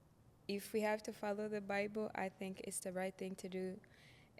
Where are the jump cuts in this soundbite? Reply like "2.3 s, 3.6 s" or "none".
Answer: none